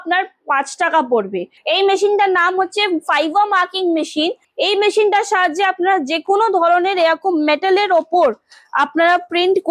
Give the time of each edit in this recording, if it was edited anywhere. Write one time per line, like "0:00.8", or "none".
0:01.5
0:04.4

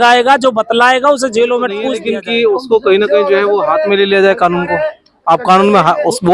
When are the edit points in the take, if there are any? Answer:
0:01.9

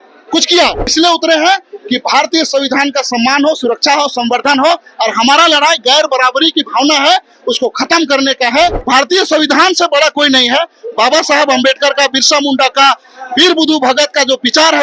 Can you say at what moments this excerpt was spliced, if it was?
0:00.9
0:08.8

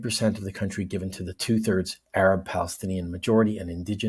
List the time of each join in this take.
none

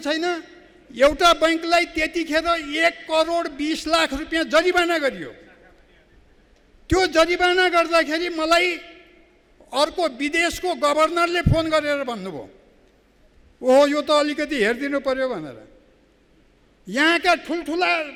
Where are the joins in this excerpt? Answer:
none

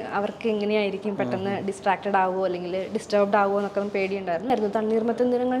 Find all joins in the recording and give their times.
0:04.5

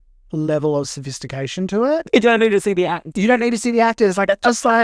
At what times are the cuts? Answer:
0:02.1

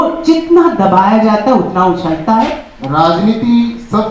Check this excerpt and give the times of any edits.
0:02.6

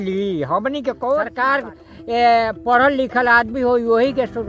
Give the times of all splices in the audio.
0:01.3

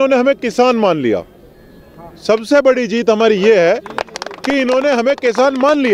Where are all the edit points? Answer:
none

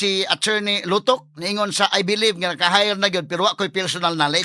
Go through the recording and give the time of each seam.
none

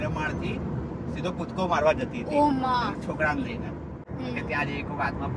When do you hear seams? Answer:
0:04.0

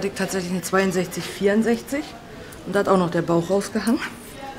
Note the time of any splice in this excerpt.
none

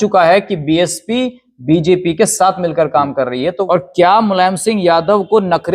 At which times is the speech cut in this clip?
0:03.6

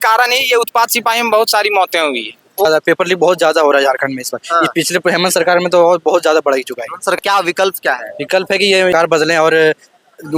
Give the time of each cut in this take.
0:02.7
0:07.2
0:08.9

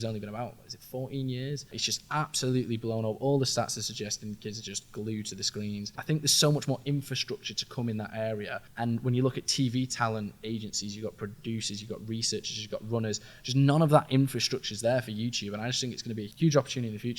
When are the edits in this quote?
0:01.8
0:06.0
0:08.6
0:16.3

